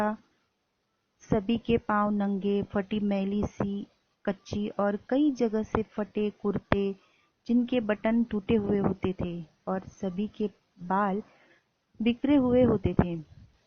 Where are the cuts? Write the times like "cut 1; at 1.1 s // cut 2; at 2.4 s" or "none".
none

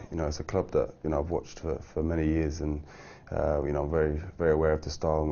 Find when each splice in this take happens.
cut 1; at 3.8 s

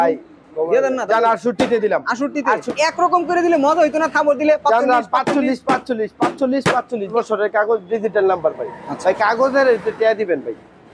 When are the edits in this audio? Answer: cut 1; at 2.7 s // cut 2; at 7.1 s

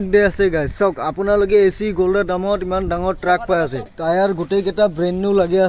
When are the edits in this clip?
cut 1; at 3.9 s

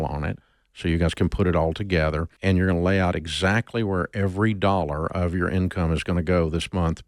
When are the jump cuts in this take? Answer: cut 1; at 2.3 s

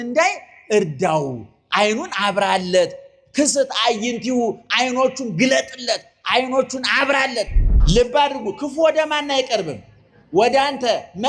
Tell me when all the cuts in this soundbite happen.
cut 1; at 7.7 s

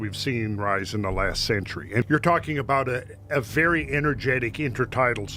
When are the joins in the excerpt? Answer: cut 1; at 2.0 s

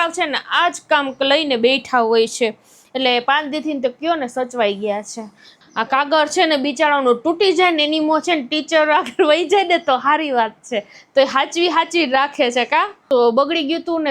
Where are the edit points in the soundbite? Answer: cut 1; at 5.5 s // cut 2; at 13.0 s

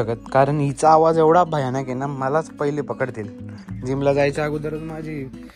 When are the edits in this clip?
none

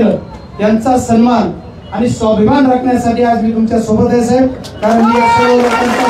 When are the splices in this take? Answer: none

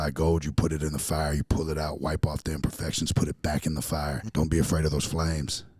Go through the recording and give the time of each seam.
cut 1; at 4.2 s

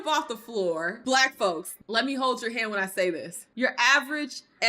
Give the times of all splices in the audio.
cut 1; at 0.9 s // cut 2; at 1.7 s

